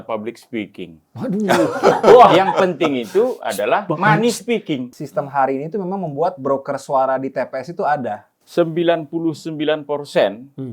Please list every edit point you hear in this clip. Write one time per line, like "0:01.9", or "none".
0:04.9
0:08.3